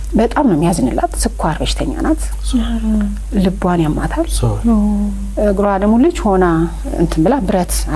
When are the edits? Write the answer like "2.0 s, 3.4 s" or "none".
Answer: none

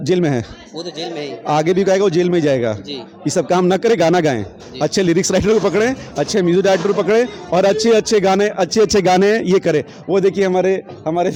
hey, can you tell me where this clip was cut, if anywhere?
none

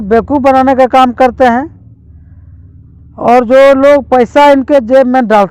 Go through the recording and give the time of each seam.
none

